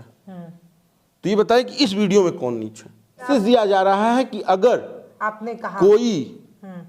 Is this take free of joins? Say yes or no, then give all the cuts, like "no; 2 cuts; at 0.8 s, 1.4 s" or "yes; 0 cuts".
no; 1 cut; at 3.2 s